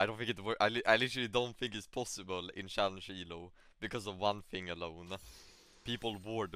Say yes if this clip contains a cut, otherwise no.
no